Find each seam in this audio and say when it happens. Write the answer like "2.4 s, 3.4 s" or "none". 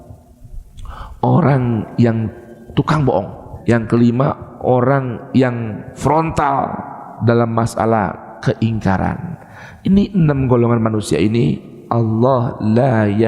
3.4 s, 5.9 s